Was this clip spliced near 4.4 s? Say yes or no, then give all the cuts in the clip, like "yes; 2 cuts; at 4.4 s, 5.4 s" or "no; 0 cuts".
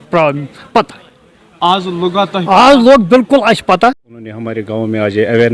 yes; 1 cut; at 4.4 s